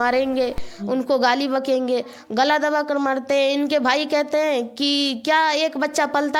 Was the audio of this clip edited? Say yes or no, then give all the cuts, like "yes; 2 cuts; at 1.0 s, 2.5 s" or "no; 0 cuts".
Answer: no; 0 cuts